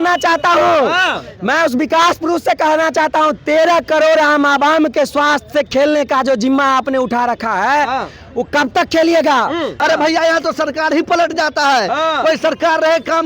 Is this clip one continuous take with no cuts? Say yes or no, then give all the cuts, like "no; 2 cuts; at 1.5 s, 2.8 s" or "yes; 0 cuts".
no; 1 cut; at 9.7 s